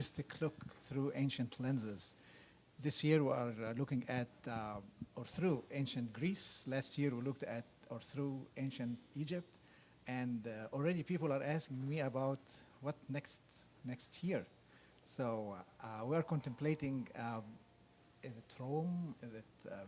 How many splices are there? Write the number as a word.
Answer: one